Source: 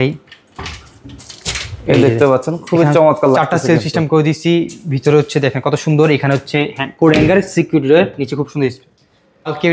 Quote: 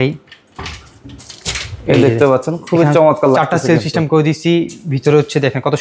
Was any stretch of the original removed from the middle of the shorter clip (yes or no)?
no